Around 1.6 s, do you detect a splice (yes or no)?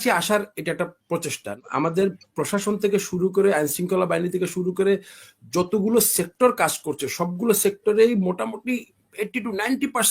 yes